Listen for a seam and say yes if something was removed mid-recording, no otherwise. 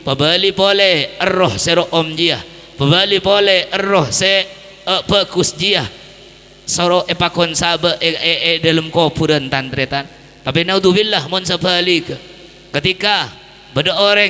no